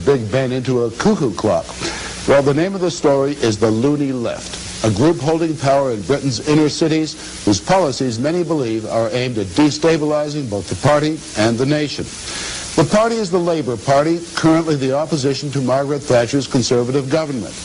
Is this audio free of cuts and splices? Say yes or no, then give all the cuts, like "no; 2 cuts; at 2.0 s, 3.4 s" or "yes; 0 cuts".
yes; 0 cuts